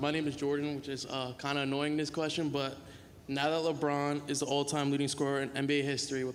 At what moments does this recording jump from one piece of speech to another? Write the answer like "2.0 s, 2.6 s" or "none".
none